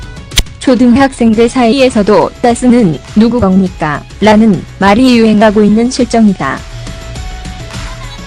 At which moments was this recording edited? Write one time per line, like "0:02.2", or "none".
0:01.4